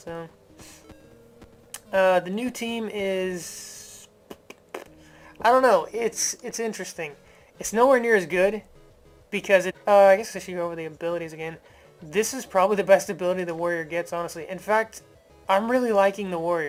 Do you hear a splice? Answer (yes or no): no